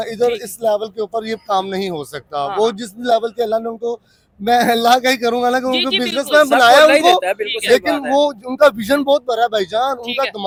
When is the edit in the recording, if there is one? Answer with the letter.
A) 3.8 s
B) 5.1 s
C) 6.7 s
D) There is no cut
D